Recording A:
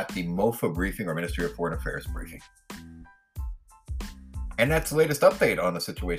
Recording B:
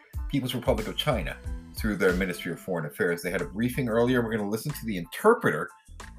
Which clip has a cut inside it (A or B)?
A